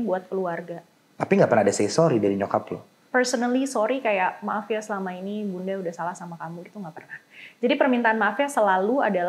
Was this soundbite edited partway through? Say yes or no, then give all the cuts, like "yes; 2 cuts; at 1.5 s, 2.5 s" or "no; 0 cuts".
no; 0 cuts